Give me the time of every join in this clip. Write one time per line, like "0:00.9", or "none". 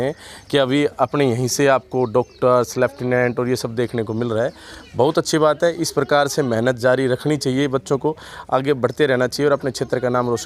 none